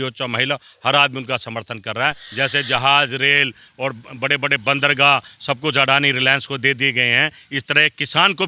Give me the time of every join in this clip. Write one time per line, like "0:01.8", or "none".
0:02.2